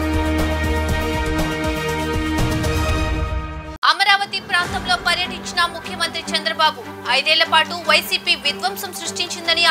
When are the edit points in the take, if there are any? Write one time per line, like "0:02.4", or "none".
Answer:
none